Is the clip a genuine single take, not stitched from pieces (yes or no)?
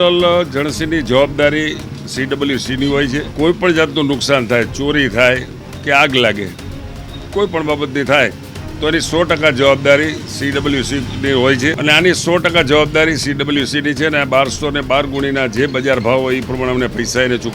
no